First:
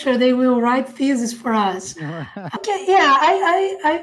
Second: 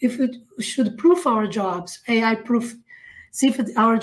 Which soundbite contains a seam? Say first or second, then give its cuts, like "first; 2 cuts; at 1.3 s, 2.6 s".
first; 1 cut; at 2.6 s